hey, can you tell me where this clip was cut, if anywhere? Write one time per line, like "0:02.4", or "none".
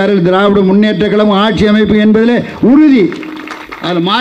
none

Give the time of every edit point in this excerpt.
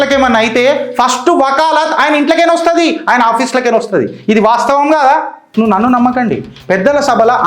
0:05.5

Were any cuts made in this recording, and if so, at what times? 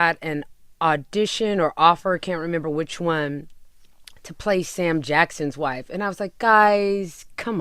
none

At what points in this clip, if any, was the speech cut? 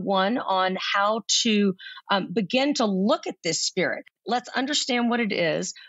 0:04.2

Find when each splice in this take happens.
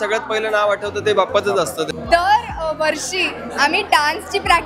0:01.9

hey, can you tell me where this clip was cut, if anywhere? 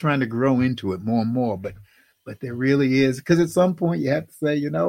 none

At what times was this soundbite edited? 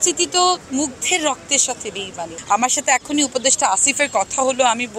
0:02.4

